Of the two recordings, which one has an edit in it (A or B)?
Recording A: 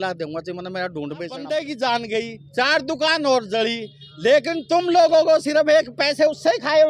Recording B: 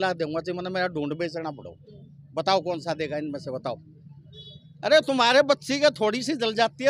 A